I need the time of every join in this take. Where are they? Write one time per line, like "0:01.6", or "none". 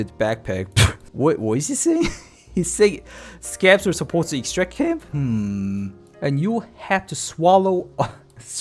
0:06.1